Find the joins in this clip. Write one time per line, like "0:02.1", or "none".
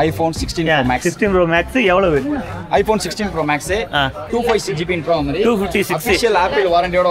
0:04.2